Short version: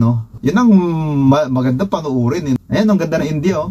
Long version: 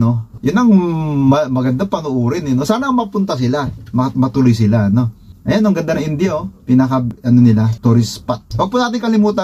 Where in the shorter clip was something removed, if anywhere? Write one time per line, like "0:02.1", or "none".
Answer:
0:02.6